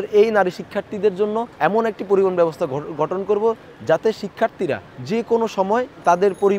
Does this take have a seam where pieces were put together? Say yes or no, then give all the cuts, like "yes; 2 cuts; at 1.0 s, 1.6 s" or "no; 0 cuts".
yes; 2 cuts; at 1.5 s, 4.9 s